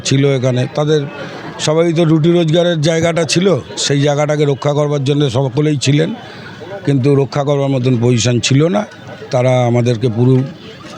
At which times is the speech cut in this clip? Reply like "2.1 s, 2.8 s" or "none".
none